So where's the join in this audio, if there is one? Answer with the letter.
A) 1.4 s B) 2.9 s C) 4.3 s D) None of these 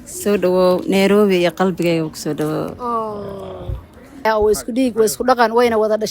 C